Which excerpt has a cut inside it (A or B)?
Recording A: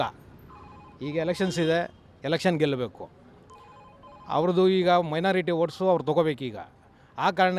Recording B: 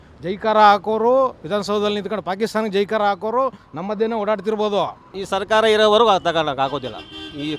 B